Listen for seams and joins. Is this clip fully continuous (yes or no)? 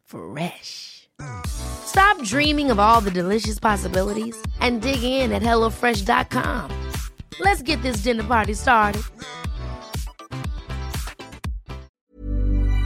no